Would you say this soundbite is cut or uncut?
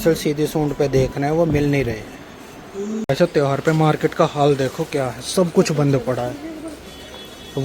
cut